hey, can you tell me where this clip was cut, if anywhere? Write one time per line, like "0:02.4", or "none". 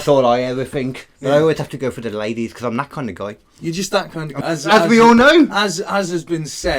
0:04.3